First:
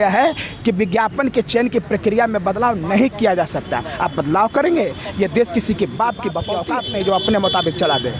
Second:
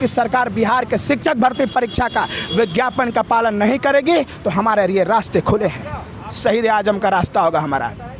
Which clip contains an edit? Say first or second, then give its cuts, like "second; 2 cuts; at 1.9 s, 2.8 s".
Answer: first; 1 cut; at 6.5 s